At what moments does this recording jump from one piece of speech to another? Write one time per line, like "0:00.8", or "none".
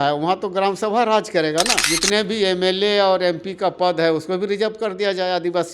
0:01.8